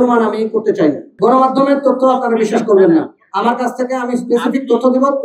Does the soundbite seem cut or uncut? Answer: cut